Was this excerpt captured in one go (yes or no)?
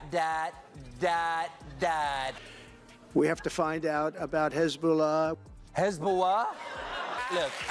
yes